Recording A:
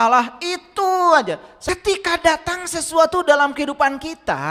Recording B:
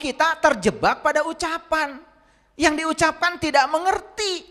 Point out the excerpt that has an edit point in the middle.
A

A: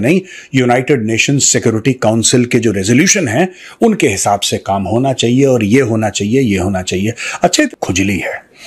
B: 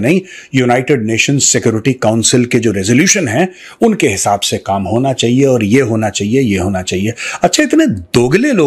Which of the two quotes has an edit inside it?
A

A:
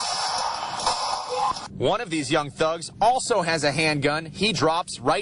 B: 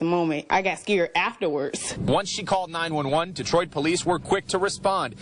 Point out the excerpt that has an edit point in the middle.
B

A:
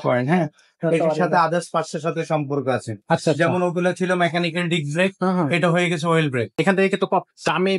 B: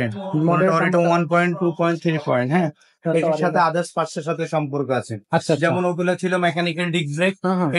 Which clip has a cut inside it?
A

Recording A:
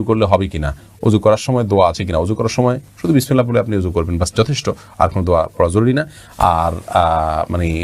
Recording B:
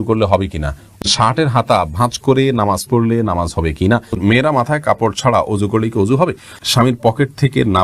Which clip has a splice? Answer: B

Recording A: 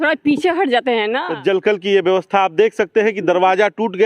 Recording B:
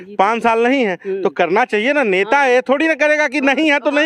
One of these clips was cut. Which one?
A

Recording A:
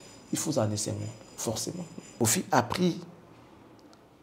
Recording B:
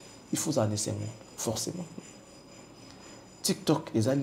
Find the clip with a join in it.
A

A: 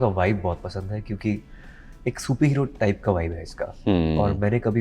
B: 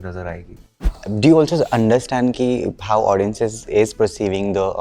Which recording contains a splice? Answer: B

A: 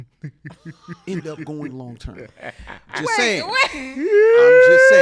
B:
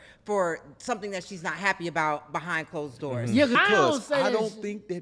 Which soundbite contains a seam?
B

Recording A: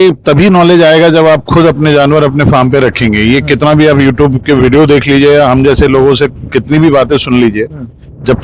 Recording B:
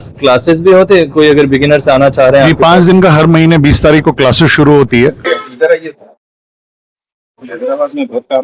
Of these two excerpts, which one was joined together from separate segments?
B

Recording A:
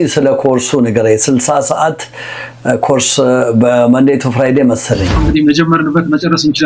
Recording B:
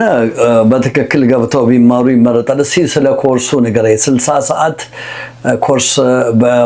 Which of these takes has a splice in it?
A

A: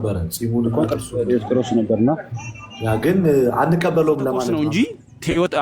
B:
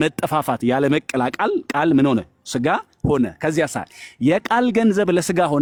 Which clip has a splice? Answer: A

